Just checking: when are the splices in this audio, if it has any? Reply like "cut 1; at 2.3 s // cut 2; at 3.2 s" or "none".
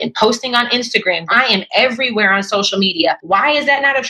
cut 1; at 1.3 s // cut 2; at 3.2 s